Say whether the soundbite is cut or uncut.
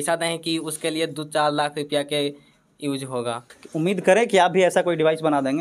cut